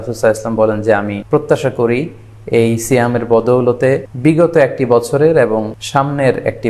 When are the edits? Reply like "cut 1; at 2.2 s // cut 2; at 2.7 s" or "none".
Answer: cut 1; at 1.2 s // cut 2; at 4.1 s // cut 3; at 5.8 s